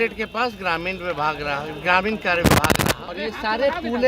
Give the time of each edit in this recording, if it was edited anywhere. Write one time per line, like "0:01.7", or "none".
0:03.1